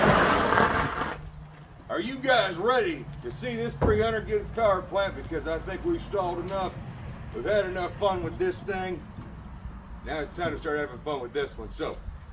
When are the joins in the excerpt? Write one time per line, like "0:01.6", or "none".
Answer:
none